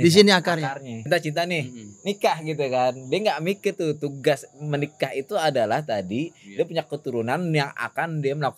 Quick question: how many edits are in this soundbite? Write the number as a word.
one